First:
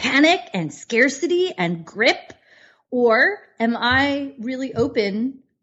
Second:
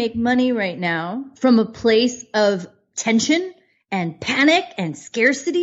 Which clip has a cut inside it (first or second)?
second